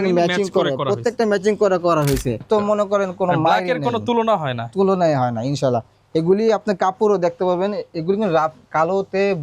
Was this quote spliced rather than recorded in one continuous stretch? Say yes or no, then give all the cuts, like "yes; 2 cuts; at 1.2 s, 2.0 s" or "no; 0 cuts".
yes; 1 cut; at 2.4 s